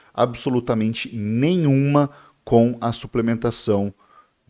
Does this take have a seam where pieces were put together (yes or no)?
no